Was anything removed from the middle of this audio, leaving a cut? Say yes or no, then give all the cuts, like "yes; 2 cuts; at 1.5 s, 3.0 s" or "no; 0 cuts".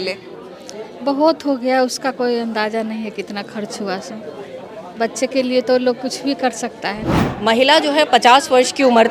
yes; 1 cut; at 7.3 s